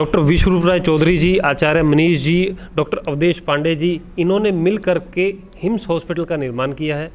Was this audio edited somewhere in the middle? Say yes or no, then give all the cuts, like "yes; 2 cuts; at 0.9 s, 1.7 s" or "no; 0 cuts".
no; 0 cuts